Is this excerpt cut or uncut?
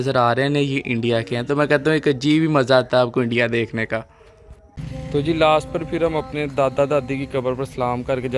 uncut